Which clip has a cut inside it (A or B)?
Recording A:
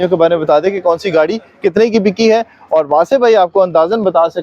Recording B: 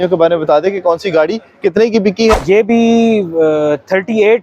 B